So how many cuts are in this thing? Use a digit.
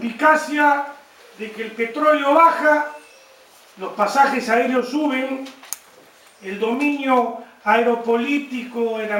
1